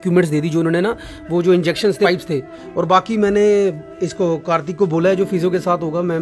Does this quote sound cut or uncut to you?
cut